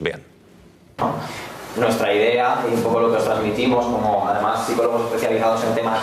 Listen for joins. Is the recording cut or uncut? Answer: uncut